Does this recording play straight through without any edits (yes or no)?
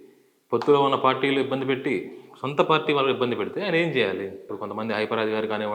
no